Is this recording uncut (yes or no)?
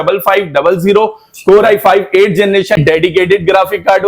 no